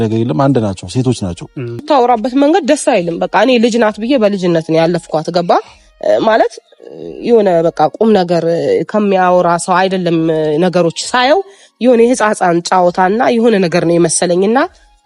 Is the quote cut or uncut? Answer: cut